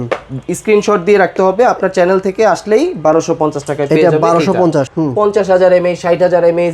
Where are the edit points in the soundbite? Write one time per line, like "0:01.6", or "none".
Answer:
0:04.9